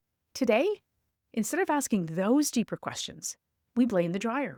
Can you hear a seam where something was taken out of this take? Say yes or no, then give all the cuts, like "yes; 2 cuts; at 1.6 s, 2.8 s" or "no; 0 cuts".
no; 0 cuts